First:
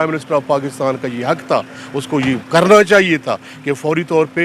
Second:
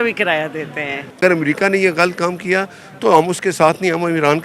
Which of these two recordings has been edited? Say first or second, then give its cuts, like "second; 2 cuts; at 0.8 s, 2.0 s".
second; 1 cut; at 1.2 s